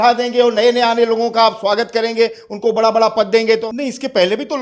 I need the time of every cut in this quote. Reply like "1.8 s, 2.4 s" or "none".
3.6 s